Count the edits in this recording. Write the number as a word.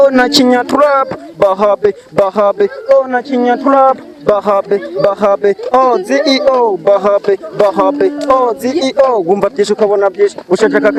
zero